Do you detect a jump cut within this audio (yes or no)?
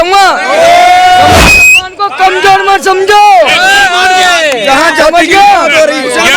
yes